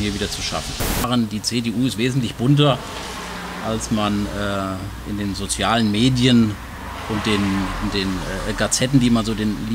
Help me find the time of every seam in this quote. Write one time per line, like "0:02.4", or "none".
0:01.0

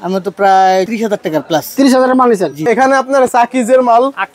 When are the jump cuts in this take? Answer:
0:00.9
0:02.6

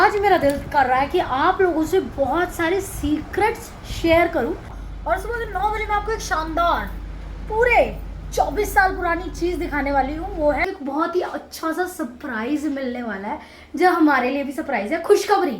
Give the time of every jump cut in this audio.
0:04.8
0:10.7

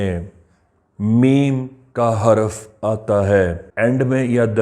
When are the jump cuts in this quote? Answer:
0:03.6

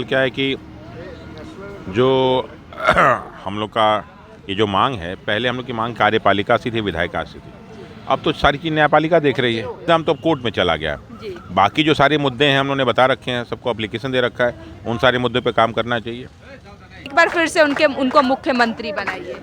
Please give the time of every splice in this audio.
0:09.8
0:17.0

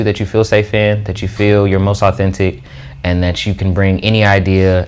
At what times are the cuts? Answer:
none

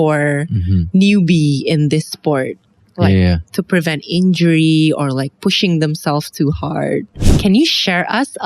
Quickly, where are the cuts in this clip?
0:07.2

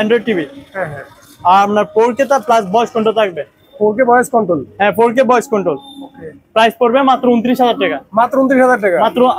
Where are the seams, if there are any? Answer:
none

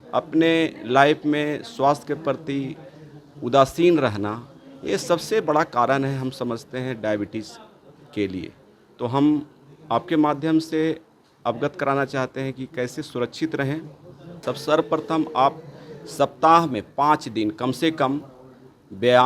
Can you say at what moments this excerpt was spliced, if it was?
0:14.4

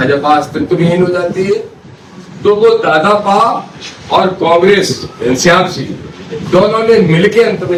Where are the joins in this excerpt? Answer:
none

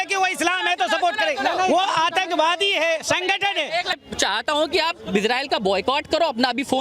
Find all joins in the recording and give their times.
0:04.0

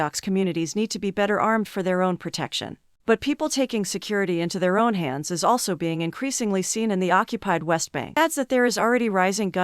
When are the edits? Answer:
0:08.2

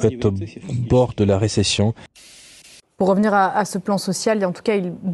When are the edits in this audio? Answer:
0:02.3

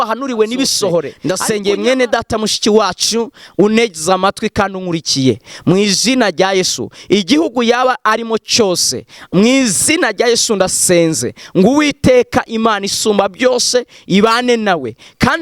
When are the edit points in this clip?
0:01.1

